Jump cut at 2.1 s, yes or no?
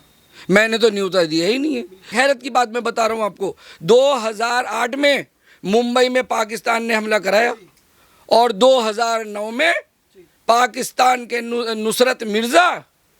yes